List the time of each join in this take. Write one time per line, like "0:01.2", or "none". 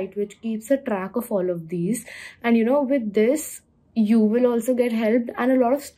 none